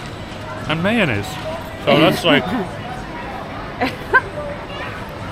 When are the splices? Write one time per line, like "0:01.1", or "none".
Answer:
none